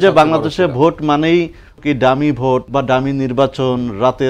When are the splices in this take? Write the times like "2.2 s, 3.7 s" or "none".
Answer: 1.8 s, 2.7 s